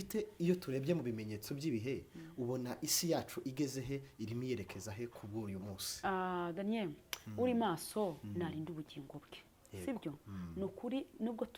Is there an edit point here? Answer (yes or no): no